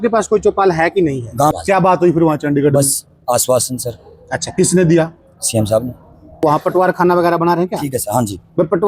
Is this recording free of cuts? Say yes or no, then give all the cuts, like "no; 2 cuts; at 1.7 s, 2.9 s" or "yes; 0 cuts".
no; 2 cuts; at 1.5 s, 6.4 s